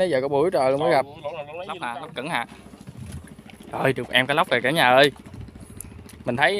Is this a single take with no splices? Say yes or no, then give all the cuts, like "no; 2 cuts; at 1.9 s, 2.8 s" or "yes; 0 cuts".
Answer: no; 1 cut; at 1.8 s